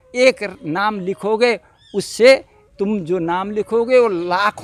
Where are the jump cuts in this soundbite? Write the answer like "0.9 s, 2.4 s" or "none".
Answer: none